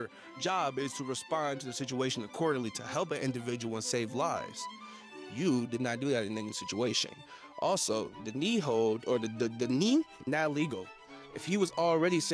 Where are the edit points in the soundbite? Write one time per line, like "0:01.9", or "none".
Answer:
none